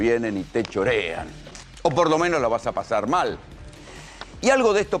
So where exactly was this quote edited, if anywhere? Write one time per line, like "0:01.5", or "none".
none